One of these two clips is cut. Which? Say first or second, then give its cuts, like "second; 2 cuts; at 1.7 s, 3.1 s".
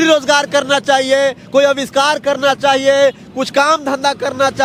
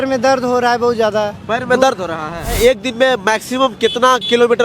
second; 1 cut; at 2.5 s